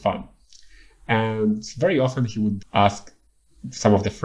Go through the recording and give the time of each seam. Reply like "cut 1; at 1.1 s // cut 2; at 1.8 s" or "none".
cut 1; at 2.6 s